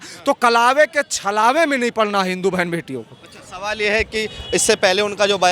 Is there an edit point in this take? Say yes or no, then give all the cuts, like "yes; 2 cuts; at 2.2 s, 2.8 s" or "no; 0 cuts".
no; 0 cuts